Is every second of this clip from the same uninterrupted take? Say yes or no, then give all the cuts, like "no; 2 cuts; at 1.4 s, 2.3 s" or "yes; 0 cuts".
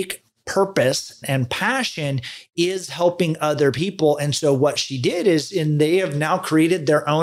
no; 1 cut; at 1.2 s